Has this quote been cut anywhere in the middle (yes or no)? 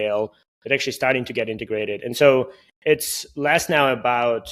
no